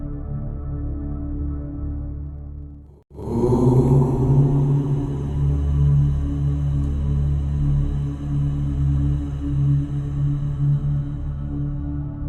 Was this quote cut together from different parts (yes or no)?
no